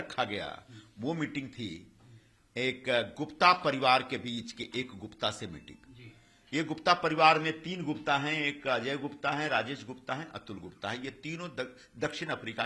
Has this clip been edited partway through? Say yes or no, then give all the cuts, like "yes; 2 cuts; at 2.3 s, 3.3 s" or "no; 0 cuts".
no; 0 cuts